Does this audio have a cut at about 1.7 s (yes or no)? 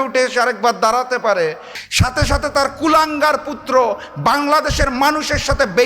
yes